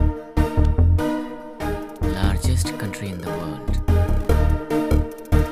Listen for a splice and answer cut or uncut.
cut